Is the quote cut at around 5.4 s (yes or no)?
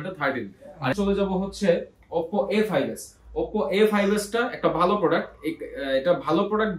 no